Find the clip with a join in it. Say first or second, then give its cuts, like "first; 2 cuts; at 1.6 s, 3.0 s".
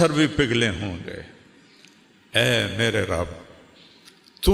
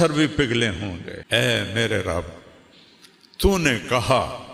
second; 1 cut; at 1.1 s